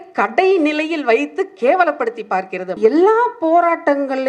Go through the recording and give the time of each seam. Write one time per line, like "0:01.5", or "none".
0:02.8